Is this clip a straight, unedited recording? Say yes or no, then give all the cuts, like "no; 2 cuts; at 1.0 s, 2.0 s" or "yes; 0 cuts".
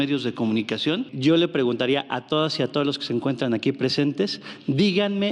no; 1 cut; at 1.1 s